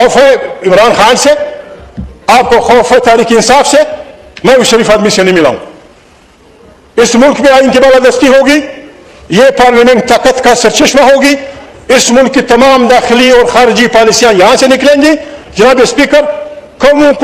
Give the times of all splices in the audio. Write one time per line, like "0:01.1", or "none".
none